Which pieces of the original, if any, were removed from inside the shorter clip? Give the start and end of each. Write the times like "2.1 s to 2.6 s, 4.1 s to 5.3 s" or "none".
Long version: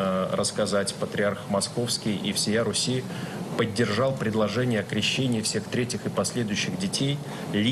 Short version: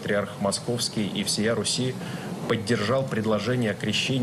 none